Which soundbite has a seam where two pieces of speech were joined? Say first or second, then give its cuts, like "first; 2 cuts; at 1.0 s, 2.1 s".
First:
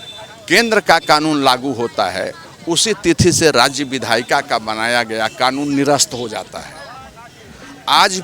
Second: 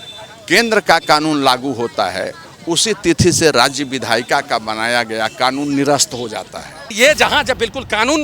second; 1 cut; at 6.9 s